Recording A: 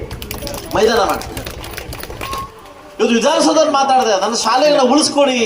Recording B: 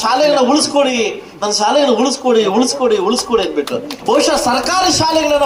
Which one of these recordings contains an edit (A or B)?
A